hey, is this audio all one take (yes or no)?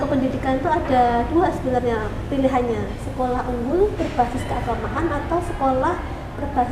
yes